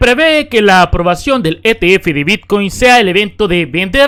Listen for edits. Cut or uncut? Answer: uncut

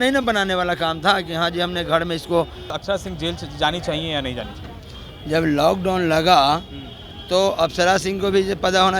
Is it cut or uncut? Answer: cut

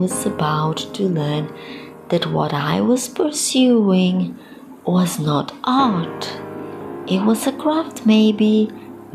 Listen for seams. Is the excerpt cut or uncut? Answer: uncut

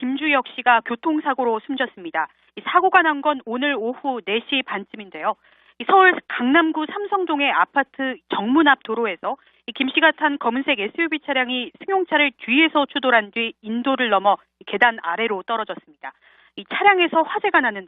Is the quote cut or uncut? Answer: cut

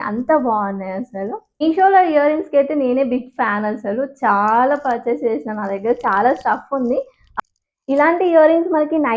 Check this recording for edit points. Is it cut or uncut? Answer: cut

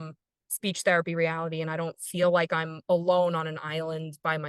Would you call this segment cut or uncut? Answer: uncut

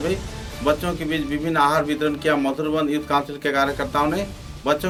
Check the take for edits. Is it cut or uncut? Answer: uncut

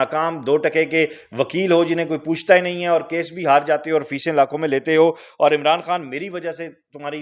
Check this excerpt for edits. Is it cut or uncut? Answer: uncut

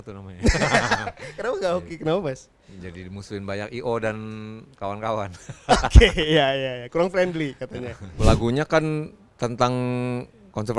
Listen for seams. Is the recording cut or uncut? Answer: cut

